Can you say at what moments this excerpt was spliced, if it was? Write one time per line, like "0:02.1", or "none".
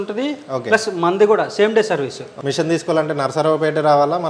0:02.3